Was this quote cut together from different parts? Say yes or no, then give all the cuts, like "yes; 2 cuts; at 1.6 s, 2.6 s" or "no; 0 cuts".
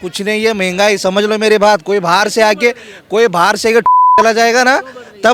no; 0 cuts